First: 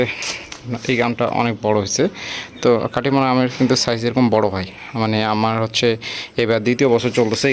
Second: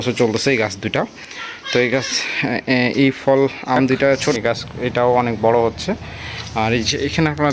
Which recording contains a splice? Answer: second; 1 cut; at 4.3 s

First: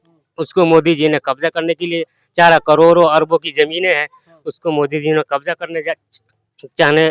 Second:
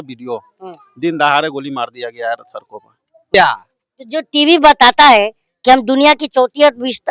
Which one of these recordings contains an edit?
second; 1 cut; at 3.3 s

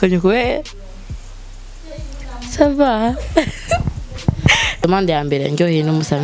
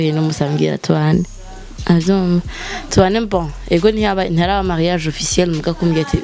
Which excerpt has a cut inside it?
first; 1 cut; at 4.8 s

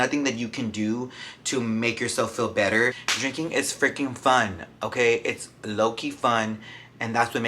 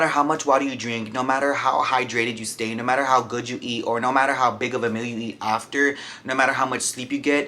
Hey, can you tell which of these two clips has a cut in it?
first; 1 cut; at 3.1 s

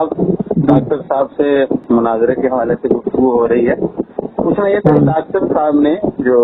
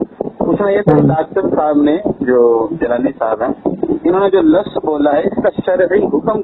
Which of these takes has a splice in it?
first; 1 cut; at 1.8 s

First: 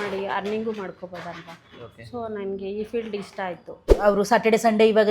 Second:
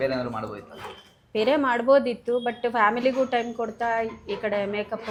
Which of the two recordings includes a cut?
first; 1 cut; at 3.9 s

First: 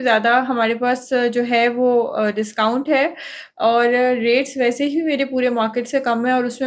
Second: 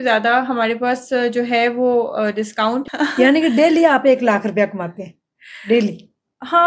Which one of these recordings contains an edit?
second; 1 cut; at 2.8 s

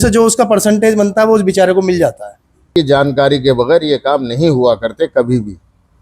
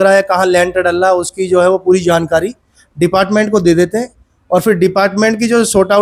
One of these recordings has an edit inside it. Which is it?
first; 1 cut; at 2.7 s

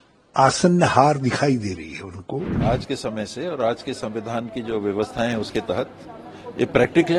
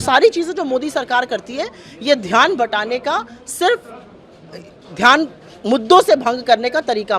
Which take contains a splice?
first; 1 cut; at 2.5 s

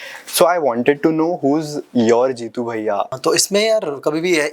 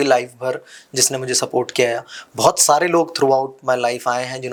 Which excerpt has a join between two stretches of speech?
first; 1 cut; at 3.2 s

